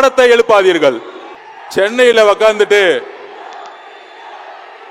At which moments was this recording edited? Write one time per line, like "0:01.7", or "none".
none